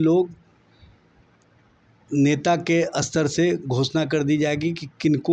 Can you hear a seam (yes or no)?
no